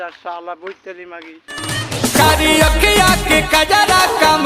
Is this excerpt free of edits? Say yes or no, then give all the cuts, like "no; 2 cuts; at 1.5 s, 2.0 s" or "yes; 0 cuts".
no; 1 cut; at 1.6 s